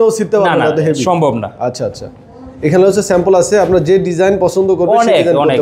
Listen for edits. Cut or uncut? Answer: uncut